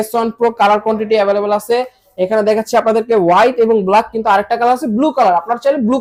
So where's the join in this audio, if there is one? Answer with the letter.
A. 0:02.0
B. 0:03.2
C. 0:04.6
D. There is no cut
D